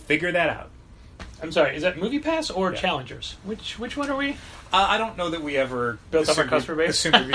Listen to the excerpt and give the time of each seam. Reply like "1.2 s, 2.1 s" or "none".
none

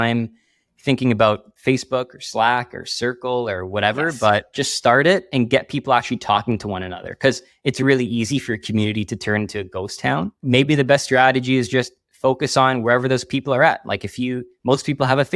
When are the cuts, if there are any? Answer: 4.5 s, 10.4 s

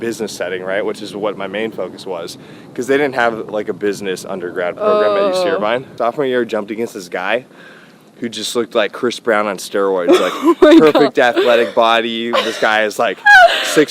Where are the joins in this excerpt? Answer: 5.9 s

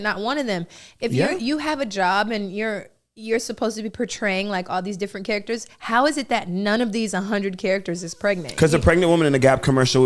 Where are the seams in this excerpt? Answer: none

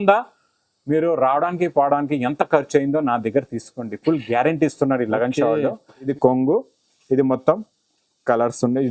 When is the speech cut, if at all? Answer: 6.1 s

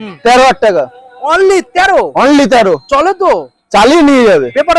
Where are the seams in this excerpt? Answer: none

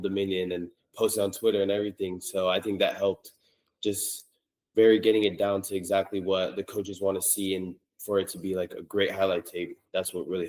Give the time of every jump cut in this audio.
none

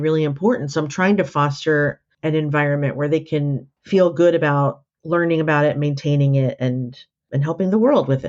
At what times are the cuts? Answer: 7.3 s

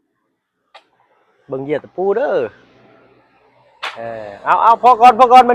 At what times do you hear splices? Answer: none

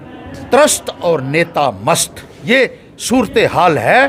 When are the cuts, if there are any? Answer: none

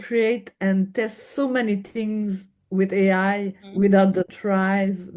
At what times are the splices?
3.6 s

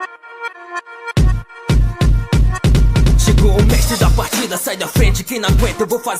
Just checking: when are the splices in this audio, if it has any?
1.1 s

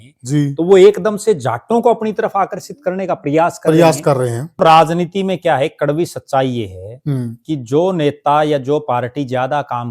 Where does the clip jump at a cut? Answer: 4.6 s

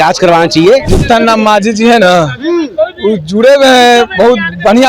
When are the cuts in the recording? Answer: 0.9 s

